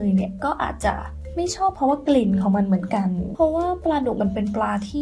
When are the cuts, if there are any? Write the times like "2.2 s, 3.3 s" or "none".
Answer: 1.1 s, 3.2 s